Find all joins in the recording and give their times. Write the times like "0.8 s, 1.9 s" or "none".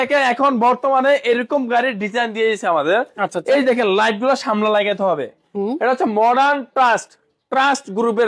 none